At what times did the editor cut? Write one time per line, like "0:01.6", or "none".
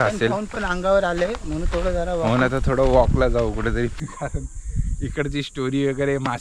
0:04.0